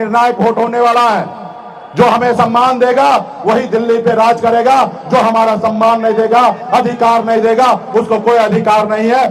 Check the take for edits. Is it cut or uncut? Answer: uncut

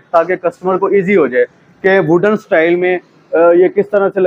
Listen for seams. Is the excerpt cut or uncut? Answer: uncut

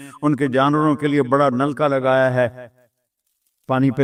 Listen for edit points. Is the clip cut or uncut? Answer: uncut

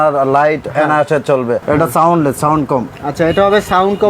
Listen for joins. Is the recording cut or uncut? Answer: cut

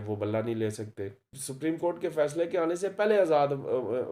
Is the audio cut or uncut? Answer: cut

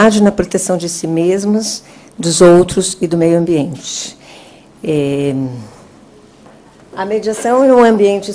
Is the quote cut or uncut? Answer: uncut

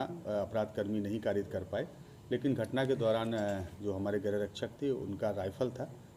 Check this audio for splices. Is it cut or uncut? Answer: uncut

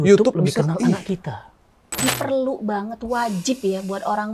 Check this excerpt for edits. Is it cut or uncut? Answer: cut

